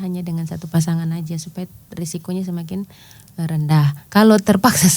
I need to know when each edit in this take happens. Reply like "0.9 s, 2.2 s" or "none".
4.0 s